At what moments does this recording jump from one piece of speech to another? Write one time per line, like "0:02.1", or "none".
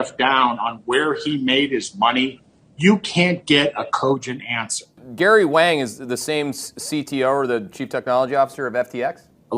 0:05.0